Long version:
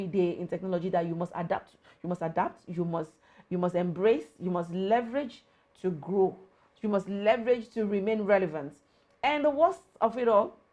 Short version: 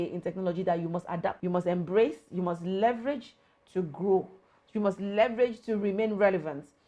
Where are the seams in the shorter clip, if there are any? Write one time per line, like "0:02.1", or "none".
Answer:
0:01.4

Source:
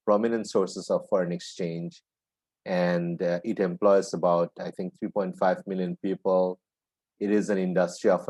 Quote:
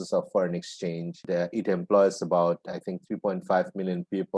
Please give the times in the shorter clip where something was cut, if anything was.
0:01.2

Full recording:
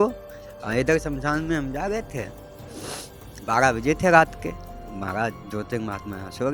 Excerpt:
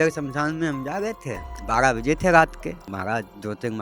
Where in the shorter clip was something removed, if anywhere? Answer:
0:01.5
0:02.8

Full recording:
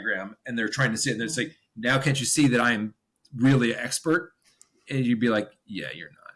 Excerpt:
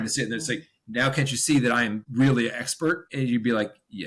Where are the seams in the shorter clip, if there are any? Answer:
0:02.0
0:03.1

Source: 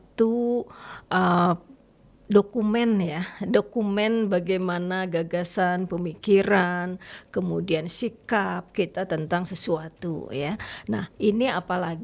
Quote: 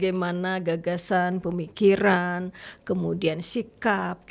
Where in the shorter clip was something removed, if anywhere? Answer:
none

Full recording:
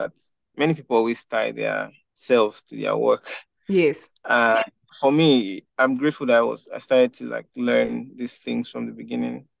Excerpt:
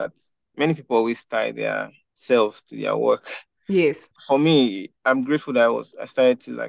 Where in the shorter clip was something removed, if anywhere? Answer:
0:04.1

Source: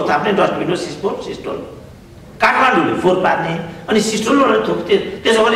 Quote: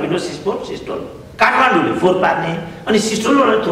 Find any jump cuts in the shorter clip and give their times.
0:01.2

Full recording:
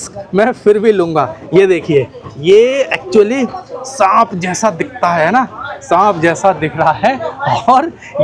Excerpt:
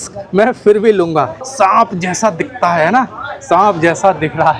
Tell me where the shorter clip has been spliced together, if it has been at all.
0:01.4

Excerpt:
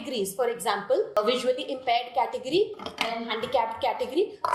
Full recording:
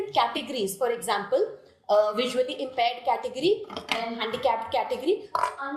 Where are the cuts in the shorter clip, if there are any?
0:01.1

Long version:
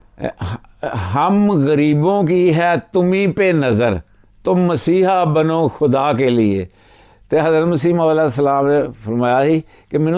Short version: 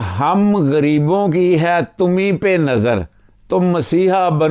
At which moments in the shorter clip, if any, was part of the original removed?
none

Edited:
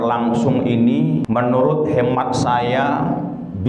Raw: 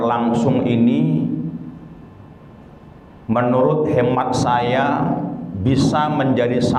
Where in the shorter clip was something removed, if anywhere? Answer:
0:01.2

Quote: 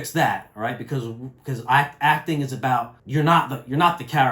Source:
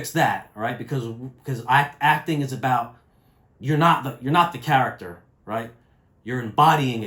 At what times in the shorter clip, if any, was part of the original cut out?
0:03.0

